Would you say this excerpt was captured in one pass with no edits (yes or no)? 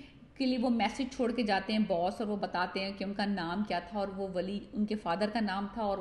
yes